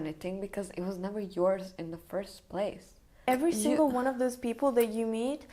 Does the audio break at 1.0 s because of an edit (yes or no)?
no